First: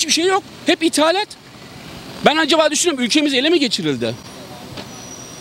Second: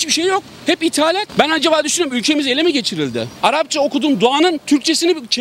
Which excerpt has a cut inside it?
second; 2 cuts; at 1.3 s, 3.3 s

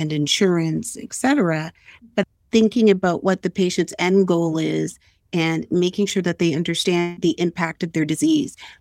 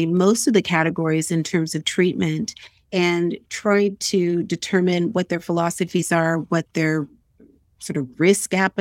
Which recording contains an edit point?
first; 2 cuts; at 2.2 s, 6.8 s

